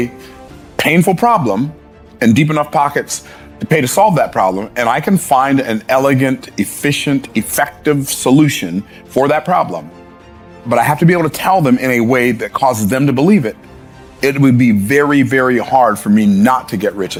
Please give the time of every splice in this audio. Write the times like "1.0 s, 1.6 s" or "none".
none